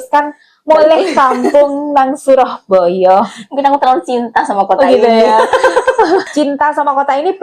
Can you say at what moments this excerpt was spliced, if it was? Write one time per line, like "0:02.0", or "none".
0:06.3